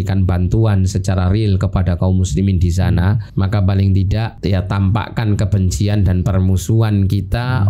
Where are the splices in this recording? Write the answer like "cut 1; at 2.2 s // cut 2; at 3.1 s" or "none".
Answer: cut 1; at 3.2 s // cut 2; at 4.3 s